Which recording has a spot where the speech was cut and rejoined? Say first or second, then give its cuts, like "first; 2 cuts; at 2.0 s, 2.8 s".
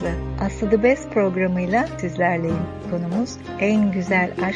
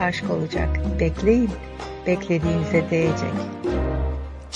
second; 1 cut; at 3.1 s